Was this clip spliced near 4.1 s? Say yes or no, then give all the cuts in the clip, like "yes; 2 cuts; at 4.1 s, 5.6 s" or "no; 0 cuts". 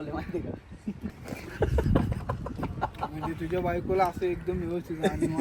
no; 1 cut; at 1.2 s